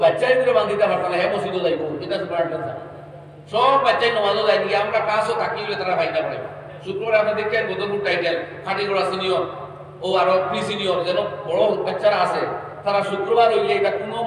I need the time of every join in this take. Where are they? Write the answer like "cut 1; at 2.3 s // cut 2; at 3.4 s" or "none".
none